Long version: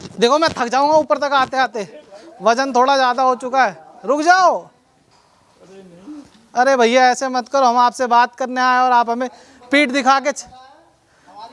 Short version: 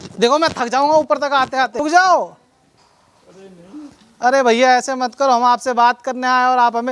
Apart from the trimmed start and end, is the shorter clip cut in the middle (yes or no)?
yes